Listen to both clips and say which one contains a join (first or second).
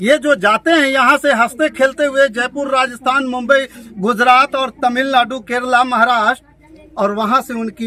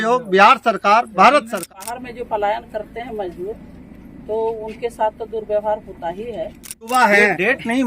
second